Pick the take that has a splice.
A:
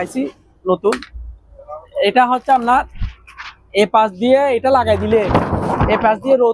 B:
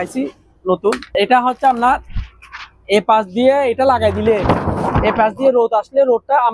B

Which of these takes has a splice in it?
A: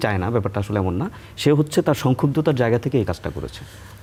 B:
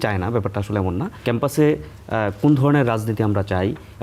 B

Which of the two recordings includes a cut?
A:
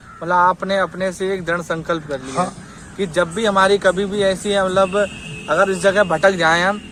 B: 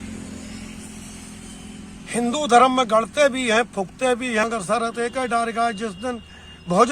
B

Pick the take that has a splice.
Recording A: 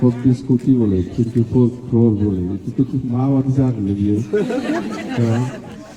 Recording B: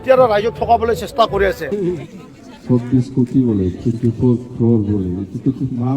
B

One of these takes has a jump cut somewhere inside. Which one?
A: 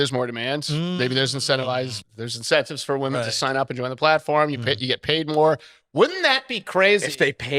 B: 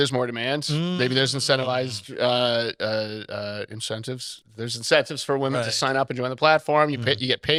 A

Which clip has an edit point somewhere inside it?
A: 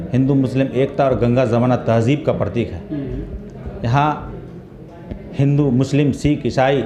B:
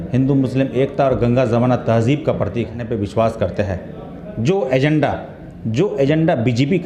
B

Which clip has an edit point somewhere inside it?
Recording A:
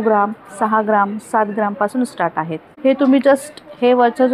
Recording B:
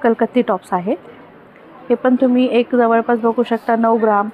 A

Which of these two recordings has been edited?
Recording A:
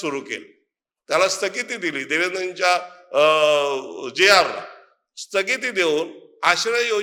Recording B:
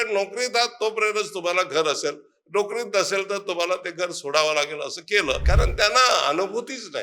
B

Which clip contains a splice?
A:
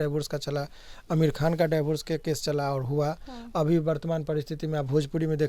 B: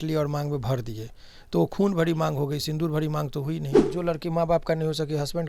B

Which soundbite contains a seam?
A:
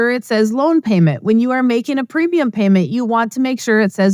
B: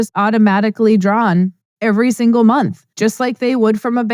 B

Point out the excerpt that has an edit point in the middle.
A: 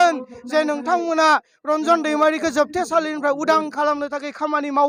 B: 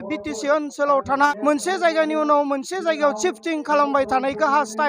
B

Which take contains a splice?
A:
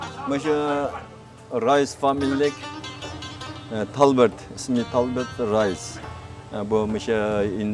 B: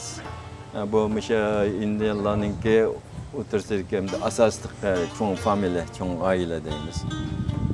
A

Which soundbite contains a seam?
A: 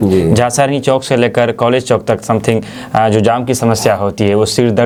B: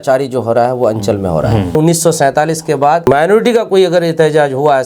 B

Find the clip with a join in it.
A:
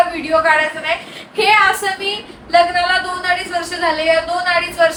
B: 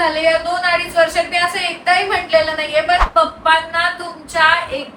B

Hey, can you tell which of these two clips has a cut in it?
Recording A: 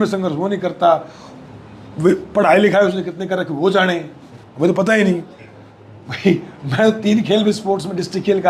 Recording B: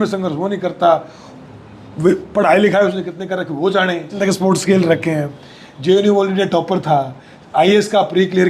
B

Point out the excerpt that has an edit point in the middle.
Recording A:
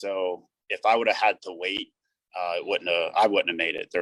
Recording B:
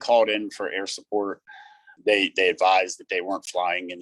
B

